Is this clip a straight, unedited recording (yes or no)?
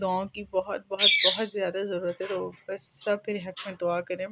yes